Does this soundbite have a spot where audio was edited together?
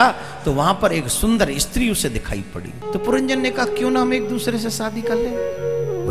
yes; 1 cut; at 2.8 s

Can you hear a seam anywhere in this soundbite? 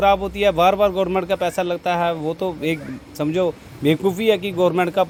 no; 0 cuts

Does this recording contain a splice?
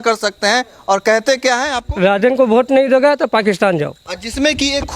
yes; 1 cut; at 1.9 s

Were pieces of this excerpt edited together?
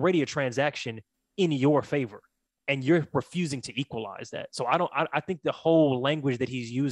no; 0 cuts

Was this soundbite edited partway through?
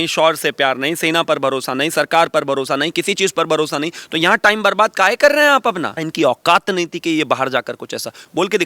yes; 1 cut; at 6.0 s

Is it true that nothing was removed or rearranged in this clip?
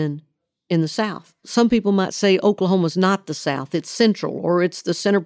no; 1 cut; at 1.5 s

